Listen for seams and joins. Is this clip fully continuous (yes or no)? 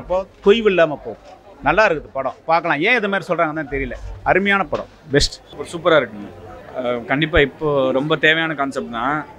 yes